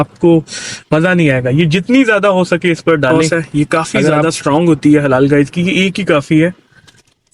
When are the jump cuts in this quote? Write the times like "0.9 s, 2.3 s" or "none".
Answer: 3.1 s